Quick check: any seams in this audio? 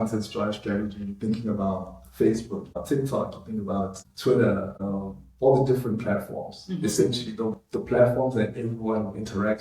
yes; 3 cuts; at 2.8 s, 4.1 s, 4.8 s

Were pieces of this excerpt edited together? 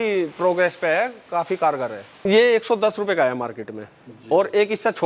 yes; 1 cut; at 2.2 s

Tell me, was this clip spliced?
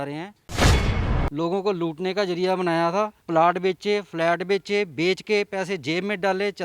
yes; 2 cuts; at 0.9 s, 3.2 s

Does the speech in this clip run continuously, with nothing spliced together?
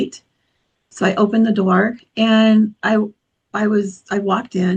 yes; 0 cuts

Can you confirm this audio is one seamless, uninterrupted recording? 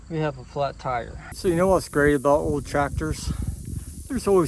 no; 1 cut; at 1.2 s

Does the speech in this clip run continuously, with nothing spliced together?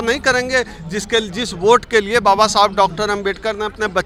yes; 0 cuts

